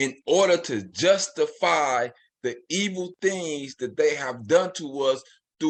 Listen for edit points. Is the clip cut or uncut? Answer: uncut